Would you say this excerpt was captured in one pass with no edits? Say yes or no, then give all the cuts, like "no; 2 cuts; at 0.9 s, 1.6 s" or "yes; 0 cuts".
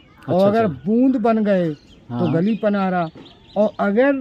yes; 0 cuts